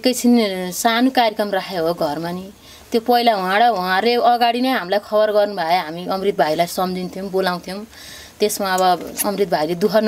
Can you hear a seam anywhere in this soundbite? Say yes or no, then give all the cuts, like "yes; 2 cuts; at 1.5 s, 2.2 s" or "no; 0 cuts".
no; 0 cuts